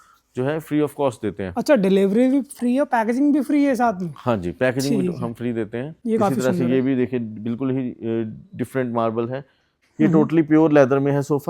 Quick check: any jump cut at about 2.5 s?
no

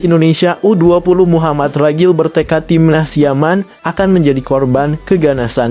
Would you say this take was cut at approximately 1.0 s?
no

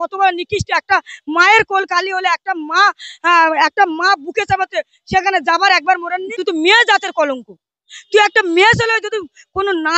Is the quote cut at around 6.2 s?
yes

